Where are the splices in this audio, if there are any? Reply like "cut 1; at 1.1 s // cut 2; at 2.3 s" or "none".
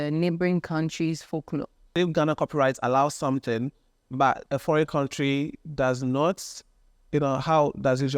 cut 1; at 1.9 s // cut 2; at 4.4 s